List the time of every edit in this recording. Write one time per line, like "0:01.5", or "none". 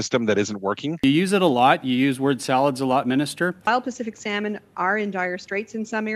0:01.0
0:03.7